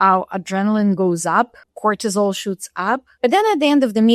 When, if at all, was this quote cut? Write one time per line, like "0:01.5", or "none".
0:01.6
0:03.1